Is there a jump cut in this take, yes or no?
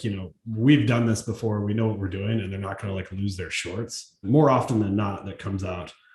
yes